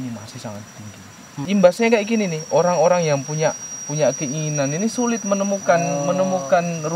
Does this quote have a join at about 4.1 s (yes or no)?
no